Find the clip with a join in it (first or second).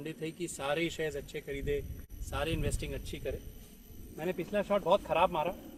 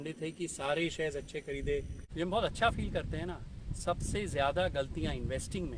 second